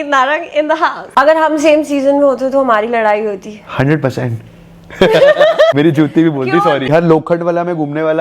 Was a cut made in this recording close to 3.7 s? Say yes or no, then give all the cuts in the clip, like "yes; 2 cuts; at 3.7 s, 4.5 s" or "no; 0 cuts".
no; 3 cuts; at 1.0 s, 5.7 s, 6.9 s